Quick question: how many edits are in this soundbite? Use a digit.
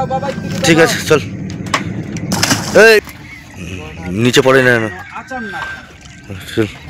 1